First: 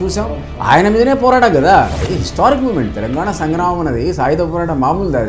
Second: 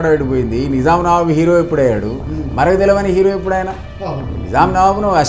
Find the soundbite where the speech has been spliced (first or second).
first